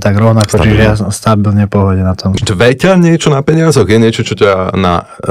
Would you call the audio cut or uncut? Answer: cut